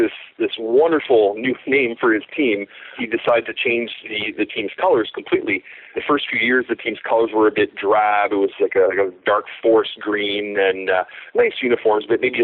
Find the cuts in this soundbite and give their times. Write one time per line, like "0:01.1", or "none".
0:02.9
0:05.9

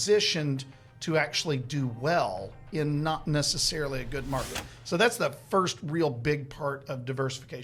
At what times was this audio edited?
none

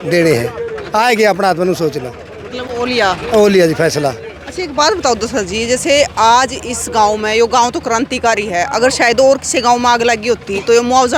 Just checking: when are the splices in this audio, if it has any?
none

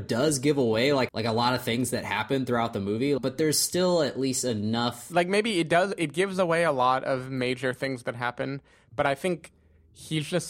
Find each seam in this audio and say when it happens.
0:01.1
0:03.2
0:05.0

